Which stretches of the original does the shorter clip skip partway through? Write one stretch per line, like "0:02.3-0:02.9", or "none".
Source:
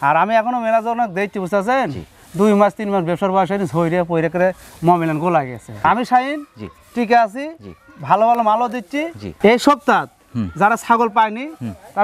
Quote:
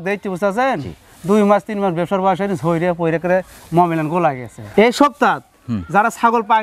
0:05.6-0:09.2